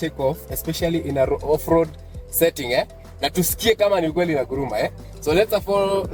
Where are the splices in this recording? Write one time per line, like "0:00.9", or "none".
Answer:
none